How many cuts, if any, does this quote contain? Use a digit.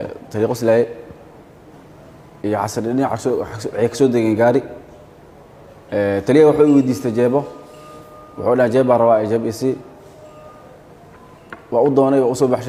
0